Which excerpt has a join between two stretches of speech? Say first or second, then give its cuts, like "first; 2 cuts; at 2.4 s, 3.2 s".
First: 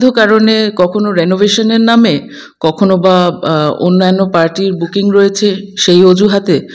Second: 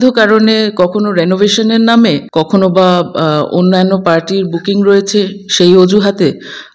second; 1 cut; at 2.2 s